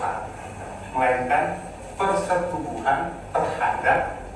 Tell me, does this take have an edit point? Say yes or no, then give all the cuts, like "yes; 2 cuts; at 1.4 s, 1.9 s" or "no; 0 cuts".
no; 0 cuts